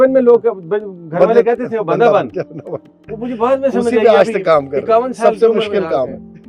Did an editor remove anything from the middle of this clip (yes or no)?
no